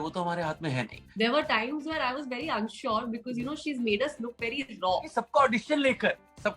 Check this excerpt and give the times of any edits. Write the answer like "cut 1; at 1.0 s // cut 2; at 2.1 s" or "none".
cut 1; at 1.0 s // cut 2; at 5.1 s